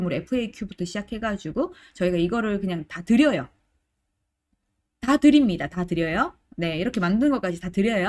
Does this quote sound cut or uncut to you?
uncut